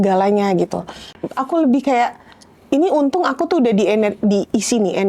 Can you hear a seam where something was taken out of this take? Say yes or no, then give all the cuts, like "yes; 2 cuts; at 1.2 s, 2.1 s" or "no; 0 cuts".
yes; 1 cut; at 1.1 s